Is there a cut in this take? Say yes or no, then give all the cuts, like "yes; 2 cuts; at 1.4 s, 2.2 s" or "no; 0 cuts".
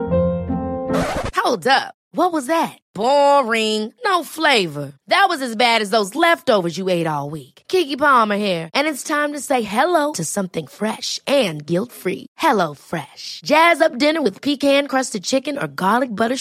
no; 0 cuts